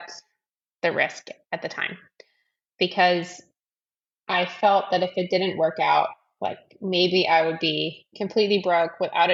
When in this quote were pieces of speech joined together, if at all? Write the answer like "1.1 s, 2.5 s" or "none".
none